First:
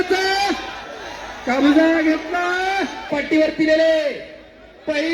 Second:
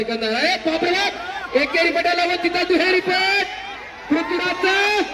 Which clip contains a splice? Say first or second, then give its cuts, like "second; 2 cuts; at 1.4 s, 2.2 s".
first; 1 cut; at 3.1 s